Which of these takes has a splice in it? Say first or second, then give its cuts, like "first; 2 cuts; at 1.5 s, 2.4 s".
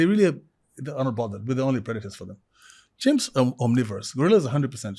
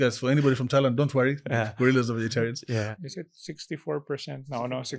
second; 1 cut; at 2.9 s